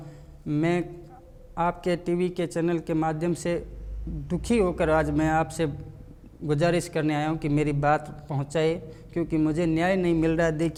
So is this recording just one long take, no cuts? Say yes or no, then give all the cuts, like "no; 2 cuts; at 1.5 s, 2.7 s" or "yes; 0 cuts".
yes; 0 cuts